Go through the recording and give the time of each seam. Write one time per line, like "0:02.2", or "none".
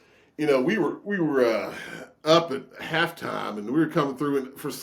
none